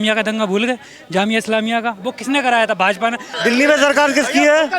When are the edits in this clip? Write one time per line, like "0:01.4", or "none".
0:03.3